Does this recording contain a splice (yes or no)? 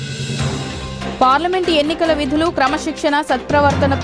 no